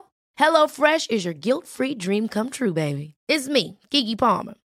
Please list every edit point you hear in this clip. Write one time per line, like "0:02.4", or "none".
none